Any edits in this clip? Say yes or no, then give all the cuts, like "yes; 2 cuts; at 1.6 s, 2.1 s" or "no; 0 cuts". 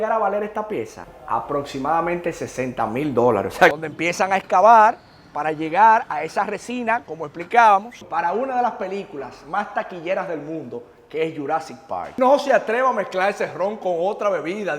yes; 3 cuts; at 3.9 s, 8.0 s, 12.2 s